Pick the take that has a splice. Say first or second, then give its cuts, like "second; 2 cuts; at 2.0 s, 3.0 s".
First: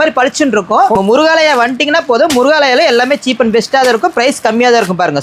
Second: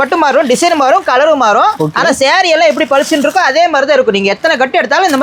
first; 1 cut; at 0.9 s